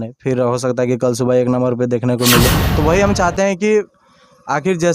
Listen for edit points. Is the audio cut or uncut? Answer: cut